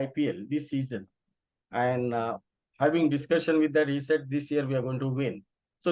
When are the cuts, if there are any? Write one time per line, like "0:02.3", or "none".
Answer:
none

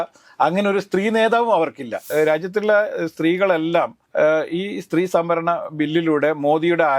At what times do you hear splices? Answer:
0:02.0
0:04.0

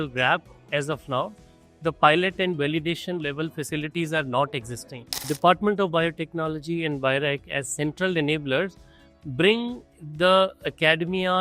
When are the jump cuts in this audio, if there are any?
0:05.3

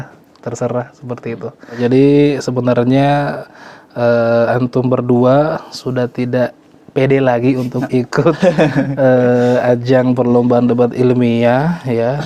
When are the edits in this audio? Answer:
0:01.8

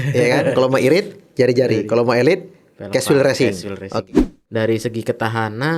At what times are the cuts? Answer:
0:04.1

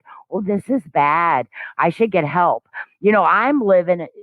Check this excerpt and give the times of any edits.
none

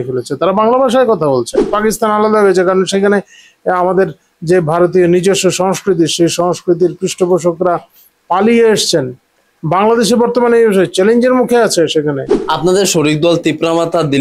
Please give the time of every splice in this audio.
0:01.7
0:12.3

